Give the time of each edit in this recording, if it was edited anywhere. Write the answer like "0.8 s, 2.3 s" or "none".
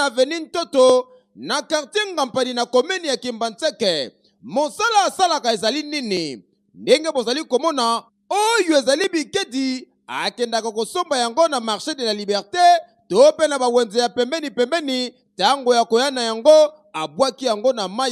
none